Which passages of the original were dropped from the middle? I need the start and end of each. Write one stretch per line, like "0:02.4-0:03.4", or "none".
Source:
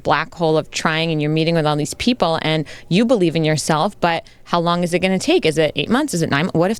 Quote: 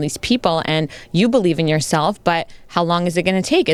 none